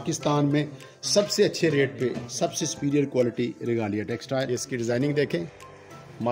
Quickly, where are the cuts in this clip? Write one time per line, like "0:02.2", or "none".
0:04.5